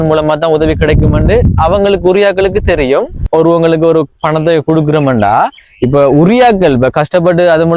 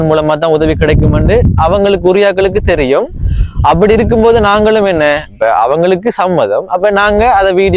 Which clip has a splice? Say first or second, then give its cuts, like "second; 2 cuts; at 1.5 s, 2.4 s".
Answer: first; 1 cut; at 3.3 s